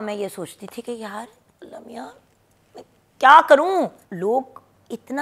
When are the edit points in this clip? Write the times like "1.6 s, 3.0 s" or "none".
4.0 s